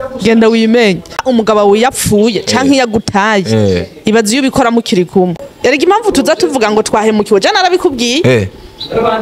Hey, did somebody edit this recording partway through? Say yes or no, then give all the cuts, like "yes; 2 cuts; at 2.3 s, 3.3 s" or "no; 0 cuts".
yes; 2 cuts; at 1.2 s, 5.4 s